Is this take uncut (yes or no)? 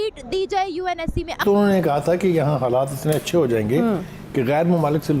no